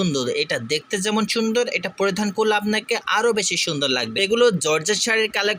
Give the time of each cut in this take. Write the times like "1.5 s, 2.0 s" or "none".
4.1 s